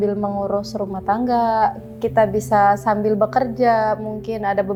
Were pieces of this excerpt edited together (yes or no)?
no